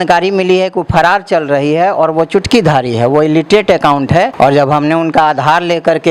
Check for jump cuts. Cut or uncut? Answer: cut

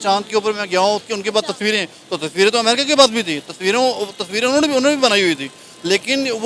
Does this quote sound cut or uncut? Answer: uncut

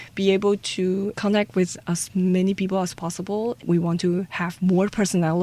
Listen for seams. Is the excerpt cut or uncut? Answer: uncut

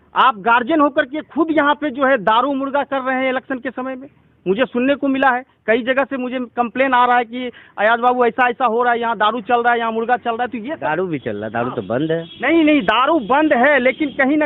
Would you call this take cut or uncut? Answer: uncut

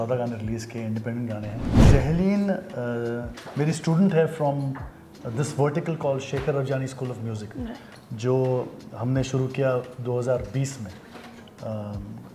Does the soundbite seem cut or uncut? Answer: cut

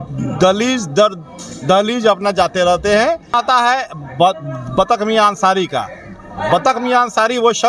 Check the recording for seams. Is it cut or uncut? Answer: cut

